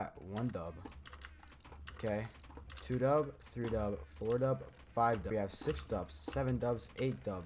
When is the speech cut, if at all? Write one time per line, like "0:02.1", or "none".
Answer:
0:05.3